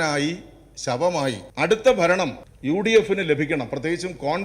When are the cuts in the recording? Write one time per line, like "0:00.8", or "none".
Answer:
0:01.5
0:02.5